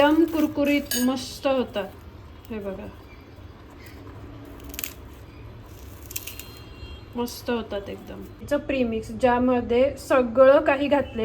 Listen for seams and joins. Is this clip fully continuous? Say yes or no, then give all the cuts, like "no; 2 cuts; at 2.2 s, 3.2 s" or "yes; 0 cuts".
no; 1 cut; at 8.4 s